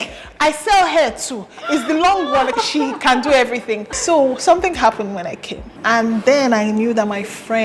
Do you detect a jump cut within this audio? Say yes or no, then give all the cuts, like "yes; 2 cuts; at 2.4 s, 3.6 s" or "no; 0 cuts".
yes; 3 cuts; at 2.5 s, 3.9 s, 5.7 s